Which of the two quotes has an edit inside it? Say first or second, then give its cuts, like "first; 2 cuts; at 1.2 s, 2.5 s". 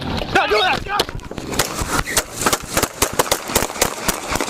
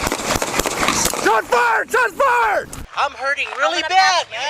second; 1 cut; at 2.8 s